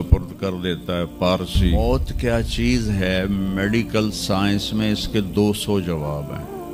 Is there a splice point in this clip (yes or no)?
yes